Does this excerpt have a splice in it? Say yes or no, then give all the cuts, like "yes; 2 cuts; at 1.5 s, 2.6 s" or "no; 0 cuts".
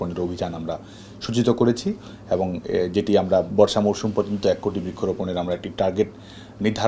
yes; 1 cut; at 3.5 s